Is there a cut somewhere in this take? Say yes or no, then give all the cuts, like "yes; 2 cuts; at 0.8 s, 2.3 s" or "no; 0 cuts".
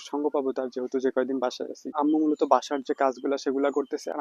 yes; 1 cut; at 1.9 s